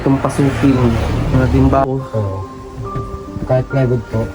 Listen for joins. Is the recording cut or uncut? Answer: cut